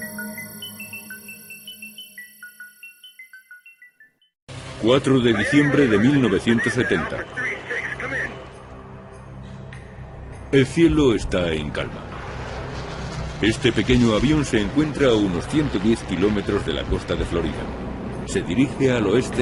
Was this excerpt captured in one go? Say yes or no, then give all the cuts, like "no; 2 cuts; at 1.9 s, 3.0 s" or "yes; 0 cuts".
yes; 0 cuts